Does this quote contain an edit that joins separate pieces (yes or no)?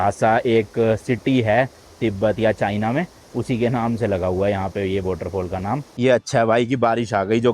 yes